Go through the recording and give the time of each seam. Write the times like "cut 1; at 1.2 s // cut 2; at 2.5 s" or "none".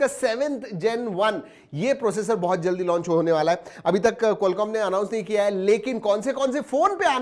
none